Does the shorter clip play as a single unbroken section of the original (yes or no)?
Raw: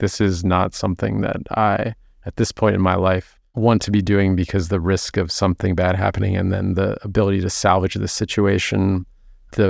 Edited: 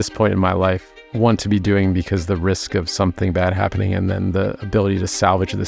yes